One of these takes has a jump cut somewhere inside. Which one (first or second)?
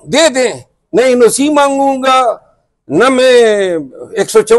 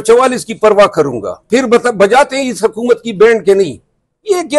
second